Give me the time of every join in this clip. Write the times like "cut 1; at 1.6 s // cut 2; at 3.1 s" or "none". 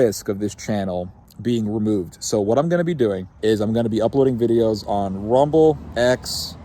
cut 1; at 1.2 s // cut 2; at 3.3 s // cut 3; at 5.8 s